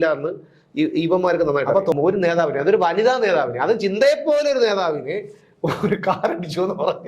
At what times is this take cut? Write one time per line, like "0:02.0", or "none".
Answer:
0:01.9